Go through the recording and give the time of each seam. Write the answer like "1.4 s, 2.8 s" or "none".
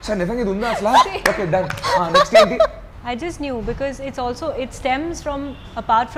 2.9 s